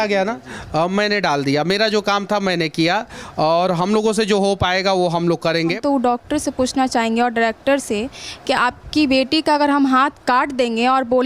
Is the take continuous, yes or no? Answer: no